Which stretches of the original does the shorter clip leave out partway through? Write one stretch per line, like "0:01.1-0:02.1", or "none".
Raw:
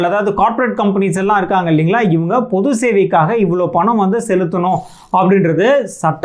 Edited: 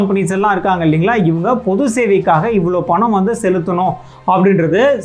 none